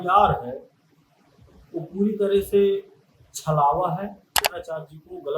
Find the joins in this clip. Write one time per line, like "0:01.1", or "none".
0:04.5